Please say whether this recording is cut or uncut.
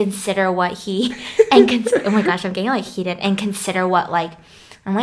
uncut